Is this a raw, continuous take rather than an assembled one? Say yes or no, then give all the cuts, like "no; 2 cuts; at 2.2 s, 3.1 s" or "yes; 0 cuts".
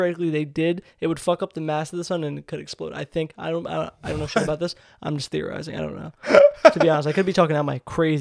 yes; 0 cuts